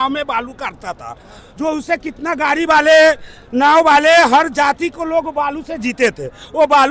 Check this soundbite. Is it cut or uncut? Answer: uncut